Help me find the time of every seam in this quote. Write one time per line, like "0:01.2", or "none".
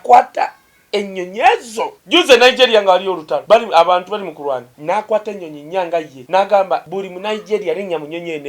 0:02.0
0:03.3
0:04.7
0:06.2
0:06.9